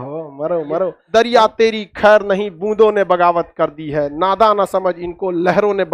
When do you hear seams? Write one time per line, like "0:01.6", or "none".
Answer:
0:01.0